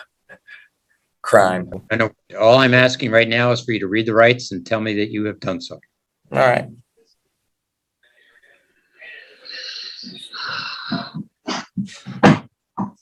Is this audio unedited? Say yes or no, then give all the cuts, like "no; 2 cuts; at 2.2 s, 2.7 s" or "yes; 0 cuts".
yes; 0 cuts